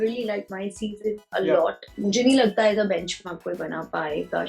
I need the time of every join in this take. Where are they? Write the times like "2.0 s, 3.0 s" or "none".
1.9 s